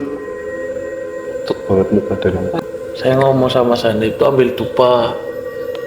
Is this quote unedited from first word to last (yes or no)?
no